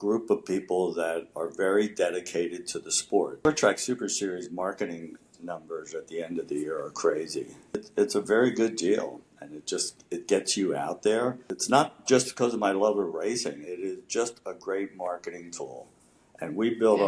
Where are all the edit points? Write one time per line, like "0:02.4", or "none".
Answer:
0:03.4
0:07.8
0:11.5